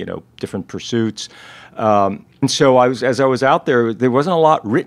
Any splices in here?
yes; 1 cut; at 2.4 s

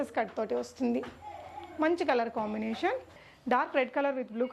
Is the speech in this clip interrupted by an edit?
yes; 1 cut; at 3.2 s

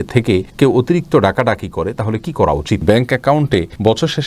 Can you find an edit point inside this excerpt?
yes; 1 cut; at 2.8 s

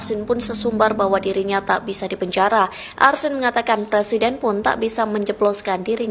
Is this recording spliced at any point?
no; 0 cuts

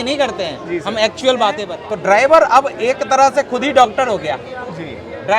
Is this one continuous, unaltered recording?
no; 1 cut; at 1.7 s

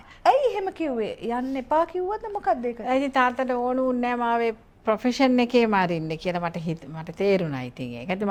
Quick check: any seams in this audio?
no; 0 cuts

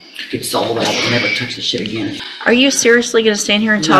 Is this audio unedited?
no; 1 cut; at 2.2 s

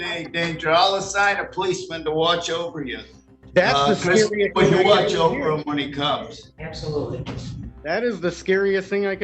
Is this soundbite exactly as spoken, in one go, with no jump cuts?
yes; 0 cuts

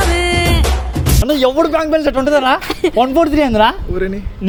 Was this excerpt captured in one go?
yes; 0 cuts

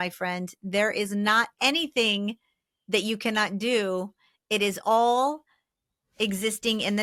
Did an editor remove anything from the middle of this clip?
no; 0 cuts

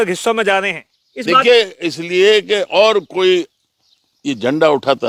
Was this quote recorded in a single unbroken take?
yes; 0 cuts

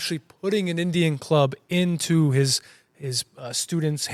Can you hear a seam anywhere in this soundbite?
no; 0 cuts

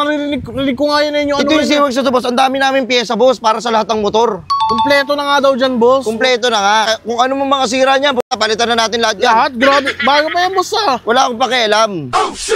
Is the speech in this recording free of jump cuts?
no; 1 cut; at 6.9 s

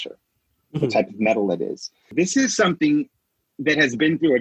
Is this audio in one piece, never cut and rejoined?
no; 1 cut; at 2.1 s

